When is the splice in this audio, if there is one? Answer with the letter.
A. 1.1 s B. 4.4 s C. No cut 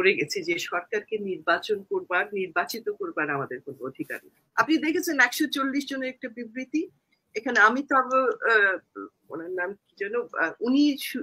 B